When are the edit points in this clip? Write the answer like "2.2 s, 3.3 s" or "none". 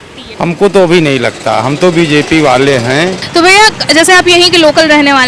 none